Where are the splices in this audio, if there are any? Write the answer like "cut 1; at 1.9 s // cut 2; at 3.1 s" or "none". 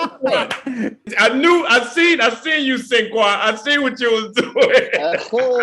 cut 1; at 1.0 s